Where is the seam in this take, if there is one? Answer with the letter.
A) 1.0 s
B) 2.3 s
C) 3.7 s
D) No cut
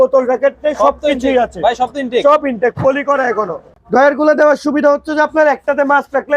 C